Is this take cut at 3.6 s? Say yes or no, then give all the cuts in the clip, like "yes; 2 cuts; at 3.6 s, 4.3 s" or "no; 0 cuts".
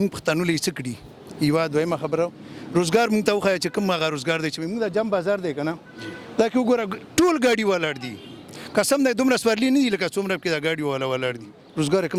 no; 0 cuts